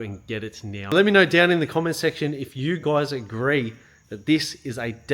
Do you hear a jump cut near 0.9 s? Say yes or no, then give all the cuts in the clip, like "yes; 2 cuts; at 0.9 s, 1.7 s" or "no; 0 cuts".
yes; 1 cut; at 0.9 s